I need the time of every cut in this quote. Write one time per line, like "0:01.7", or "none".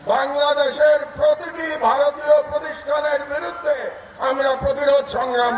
none